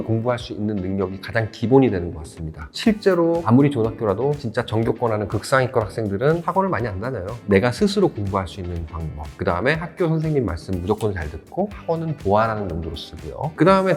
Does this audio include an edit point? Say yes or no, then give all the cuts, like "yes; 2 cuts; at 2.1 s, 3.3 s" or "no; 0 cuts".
no; 0 cuts